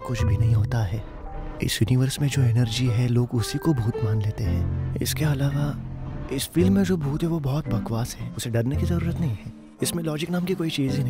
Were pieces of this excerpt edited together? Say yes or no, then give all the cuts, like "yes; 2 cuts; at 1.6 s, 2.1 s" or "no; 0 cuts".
no; 0 cuts